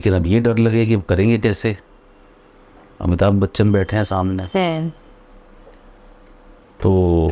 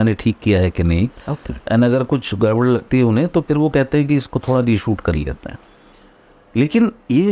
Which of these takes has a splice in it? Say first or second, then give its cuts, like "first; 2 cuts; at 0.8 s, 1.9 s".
second; 1 cut; at 5.8 s